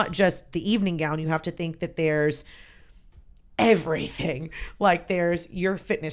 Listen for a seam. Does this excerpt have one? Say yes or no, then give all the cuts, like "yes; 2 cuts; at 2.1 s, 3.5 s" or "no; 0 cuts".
no; 0 cuts